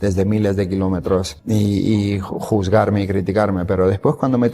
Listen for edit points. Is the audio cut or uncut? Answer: cut